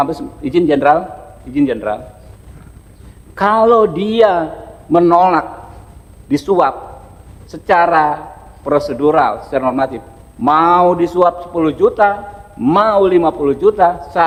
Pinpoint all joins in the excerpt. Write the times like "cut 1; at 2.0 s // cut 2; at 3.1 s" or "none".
none